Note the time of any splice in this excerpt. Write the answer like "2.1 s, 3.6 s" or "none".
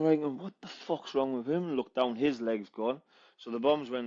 none